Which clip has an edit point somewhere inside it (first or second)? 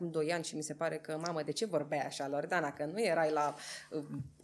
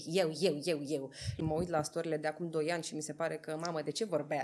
second